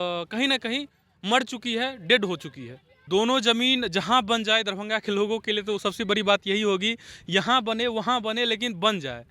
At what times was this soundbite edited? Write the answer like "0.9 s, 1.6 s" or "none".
3.1 s